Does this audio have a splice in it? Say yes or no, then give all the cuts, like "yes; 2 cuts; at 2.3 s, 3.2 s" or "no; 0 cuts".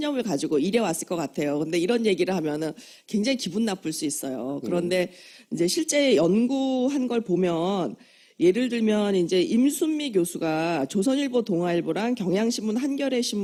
no; 0 cuts